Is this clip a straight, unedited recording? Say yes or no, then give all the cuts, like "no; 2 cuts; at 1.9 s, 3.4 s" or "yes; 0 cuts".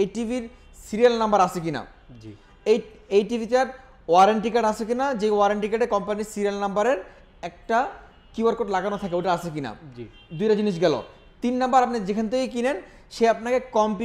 yes; 0 cuts